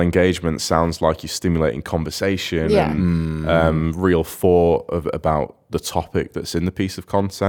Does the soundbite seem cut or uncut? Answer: uncut